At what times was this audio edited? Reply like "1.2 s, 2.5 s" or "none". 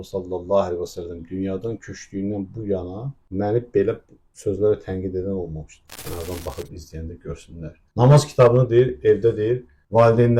5.9 s